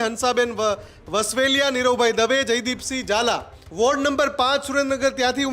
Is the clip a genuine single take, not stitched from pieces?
no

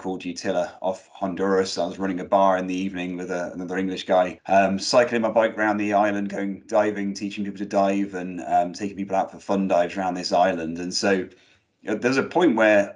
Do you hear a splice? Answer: yes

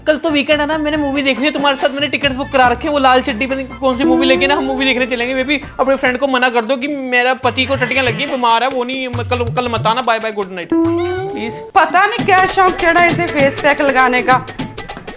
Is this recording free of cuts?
no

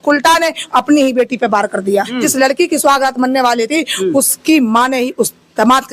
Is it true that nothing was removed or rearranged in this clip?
no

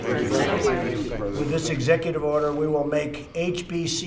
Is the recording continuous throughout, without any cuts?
yes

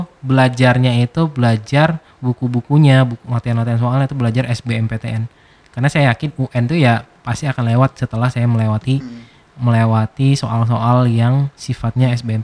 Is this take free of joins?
yes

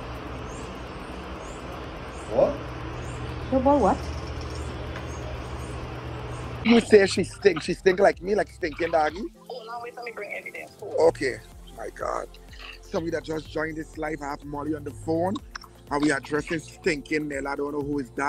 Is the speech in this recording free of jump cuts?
no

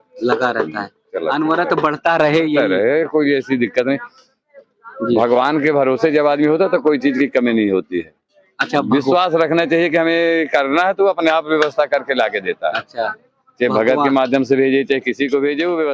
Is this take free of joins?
yes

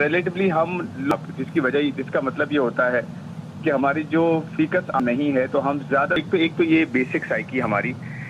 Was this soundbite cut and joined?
yes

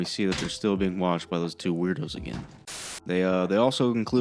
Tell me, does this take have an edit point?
yes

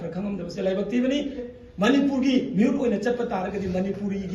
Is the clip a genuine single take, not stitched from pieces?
no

